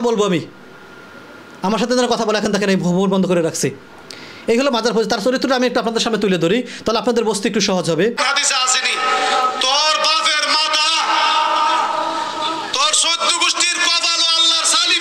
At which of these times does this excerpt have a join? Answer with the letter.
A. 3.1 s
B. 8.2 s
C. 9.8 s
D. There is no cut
B